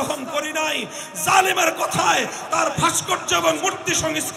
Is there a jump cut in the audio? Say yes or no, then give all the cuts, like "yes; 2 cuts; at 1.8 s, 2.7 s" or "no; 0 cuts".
no; 0 cuts